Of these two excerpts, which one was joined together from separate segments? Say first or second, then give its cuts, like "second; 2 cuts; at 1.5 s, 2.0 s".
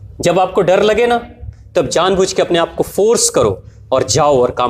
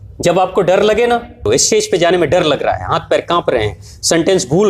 second; 1 cut; at 1.5 s